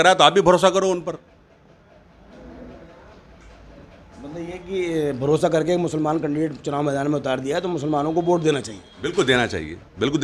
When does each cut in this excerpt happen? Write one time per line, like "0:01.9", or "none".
none